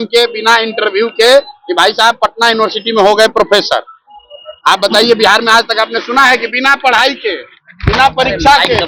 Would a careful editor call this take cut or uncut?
uncut